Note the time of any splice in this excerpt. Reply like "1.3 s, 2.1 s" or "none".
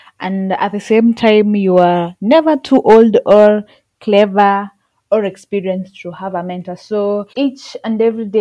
7.3 s